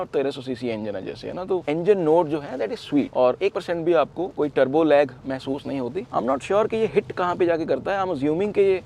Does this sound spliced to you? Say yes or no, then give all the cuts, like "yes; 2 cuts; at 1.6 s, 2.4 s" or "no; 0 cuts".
no; 0 cuts